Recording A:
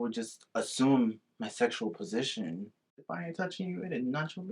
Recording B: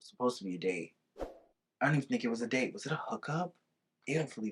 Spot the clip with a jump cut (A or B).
A